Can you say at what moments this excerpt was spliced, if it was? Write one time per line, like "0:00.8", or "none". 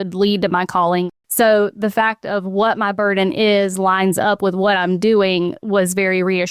0:01.1